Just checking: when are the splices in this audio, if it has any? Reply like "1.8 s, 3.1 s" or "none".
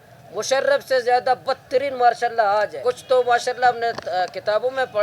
2.8 s

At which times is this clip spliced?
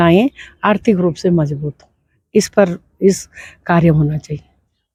none

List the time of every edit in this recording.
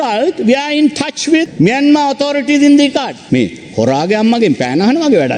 1.5 s

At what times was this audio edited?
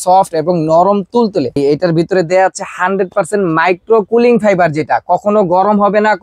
1.6 s

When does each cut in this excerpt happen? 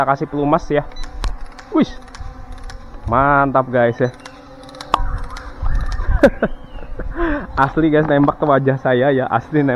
none

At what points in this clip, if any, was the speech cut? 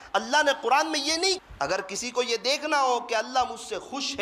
1.4 s

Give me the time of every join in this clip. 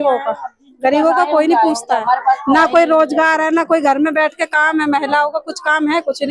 none

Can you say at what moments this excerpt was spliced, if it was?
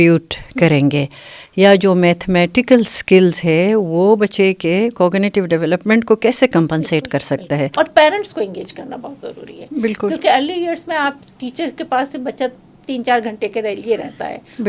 7.7 s

